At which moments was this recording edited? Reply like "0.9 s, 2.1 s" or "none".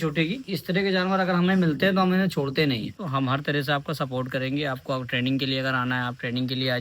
3.0 s